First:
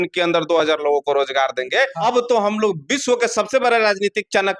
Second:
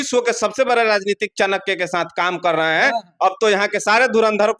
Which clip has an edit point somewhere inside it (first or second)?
first